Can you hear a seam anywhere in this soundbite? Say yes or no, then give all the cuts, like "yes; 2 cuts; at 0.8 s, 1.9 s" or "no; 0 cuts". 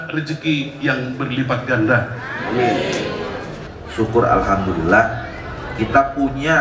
yes; 1 cut; at 3.5 s